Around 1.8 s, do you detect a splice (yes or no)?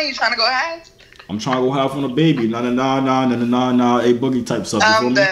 no